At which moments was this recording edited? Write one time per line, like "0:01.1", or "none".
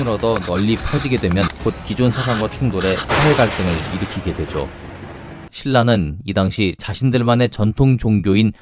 0:05.5